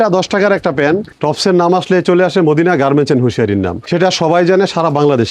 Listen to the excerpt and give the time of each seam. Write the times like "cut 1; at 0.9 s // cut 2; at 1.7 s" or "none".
cut 1; at 1.1 s // cut 2; at 3.8 s